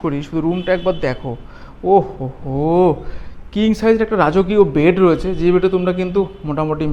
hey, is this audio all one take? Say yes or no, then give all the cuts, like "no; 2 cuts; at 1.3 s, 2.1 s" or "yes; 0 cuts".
yes; 0 cuts